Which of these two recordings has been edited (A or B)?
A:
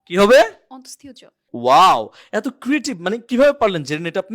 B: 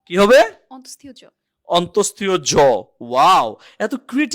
A